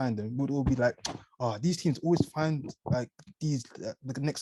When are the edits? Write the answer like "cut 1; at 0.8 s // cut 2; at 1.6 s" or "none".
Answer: none